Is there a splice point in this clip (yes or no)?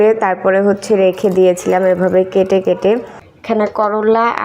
yes